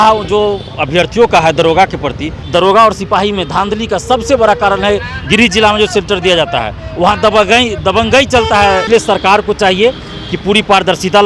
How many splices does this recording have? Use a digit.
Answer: 2